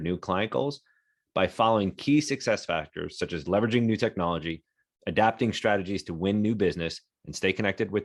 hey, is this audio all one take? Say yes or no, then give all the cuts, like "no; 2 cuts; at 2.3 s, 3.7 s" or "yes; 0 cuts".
yes; 0 cuts